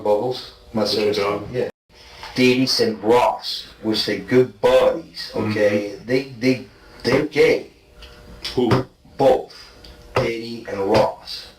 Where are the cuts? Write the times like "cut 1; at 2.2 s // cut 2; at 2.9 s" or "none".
cut 1; at 1.7 s